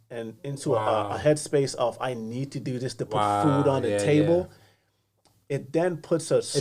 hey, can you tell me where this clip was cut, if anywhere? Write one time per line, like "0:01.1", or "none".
none

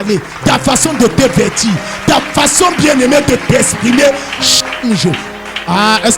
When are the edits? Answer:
none

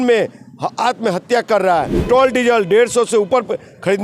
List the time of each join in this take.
0:02.0

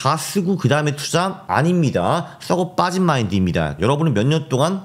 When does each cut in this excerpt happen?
0:01.4
0:03.7

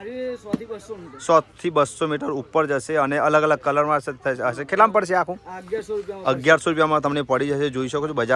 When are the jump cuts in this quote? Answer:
none

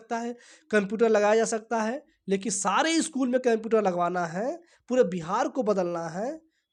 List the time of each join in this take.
none

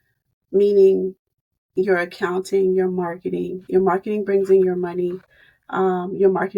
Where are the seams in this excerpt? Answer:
none

